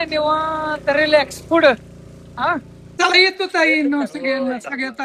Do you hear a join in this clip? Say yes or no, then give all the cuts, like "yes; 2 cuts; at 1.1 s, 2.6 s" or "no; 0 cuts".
yes; 1 cut; at 2.8 s